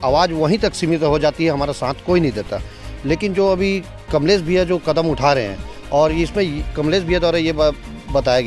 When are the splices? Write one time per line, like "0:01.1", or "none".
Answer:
none